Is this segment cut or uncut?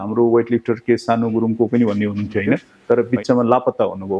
cut